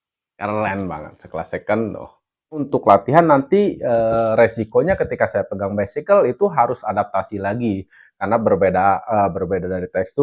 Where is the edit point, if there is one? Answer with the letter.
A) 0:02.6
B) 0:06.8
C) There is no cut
A